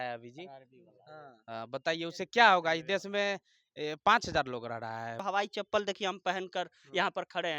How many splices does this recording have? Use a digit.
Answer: 1